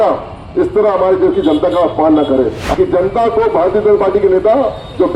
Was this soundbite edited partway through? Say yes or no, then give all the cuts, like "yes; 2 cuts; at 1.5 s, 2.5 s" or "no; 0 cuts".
yes; 1 cut; at 2.6 s